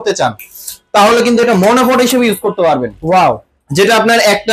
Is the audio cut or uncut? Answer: uncut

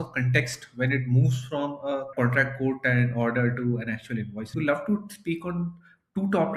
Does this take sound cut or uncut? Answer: cut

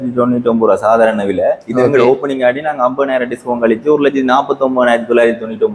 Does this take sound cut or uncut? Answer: uncut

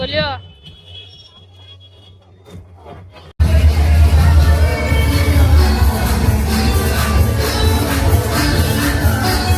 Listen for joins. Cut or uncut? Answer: uncut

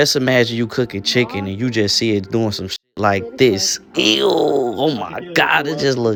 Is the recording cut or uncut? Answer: uncut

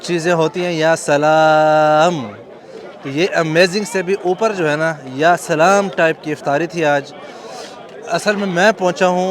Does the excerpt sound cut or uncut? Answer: uncut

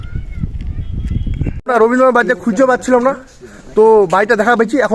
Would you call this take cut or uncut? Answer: cut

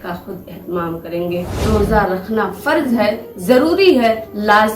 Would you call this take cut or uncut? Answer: cut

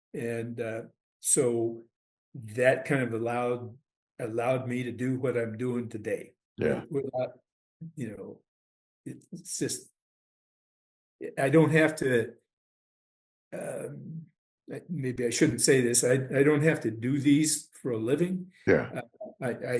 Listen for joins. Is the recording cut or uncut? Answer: uncut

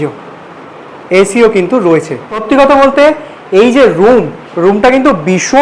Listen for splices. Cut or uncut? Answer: cut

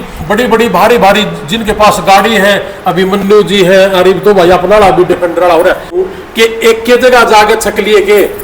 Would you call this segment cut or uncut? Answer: cut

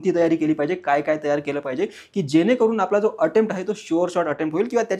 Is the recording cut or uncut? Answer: uncut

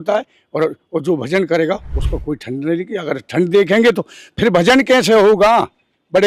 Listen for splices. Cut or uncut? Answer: uncut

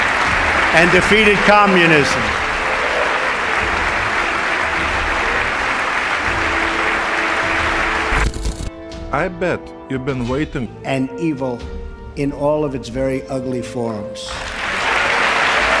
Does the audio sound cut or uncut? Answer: uncut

